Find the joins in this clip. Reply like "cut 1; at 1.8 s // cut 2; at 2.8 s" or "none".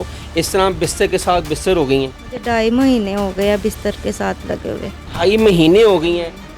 cut 1; at 5.0 s